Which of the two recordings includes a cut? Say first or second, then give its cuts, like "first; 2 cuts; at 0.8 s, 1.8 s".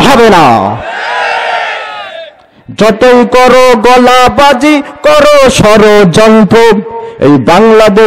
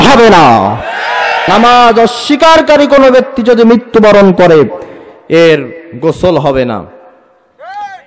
second; 1 cut; at 1.4 s